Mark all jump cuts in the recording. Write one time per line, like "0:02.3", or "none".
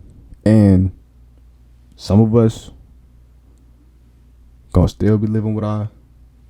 none

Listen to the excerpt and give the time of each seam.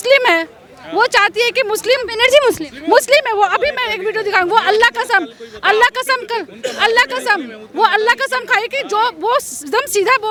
none

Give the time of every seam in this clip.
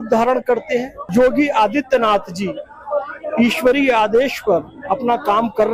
0:01.0

